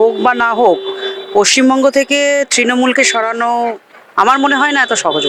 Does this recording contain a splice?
no; 0 cuts

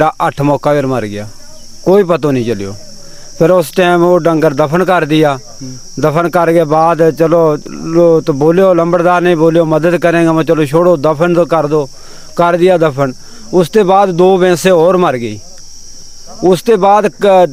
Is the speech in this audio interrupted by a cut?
no; 0 cuts

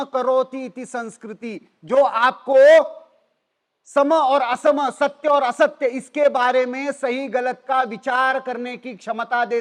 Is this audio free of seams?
yes; 0 cuts

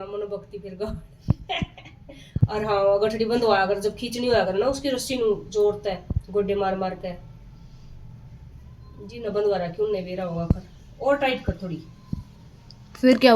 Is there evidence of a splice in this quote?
no; 0 cuts

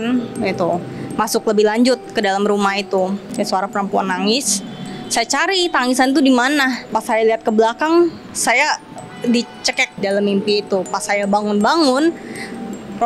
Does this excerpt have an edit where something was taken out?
yes; 3 cuts; at 3.2 s, 6.8 s, 9.9 s

